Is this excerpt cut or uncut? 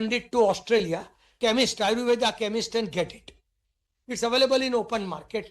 cut